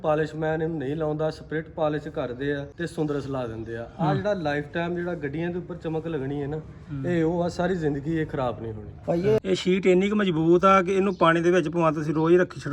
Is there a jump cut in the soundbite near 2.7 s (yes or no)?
yes